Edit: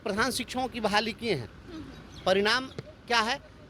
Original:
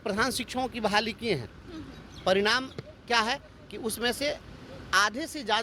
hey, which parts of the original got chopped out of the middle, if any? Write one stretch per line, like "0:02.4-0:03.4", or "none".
none